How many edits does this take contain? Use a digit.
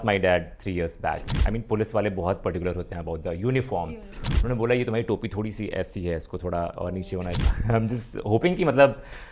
2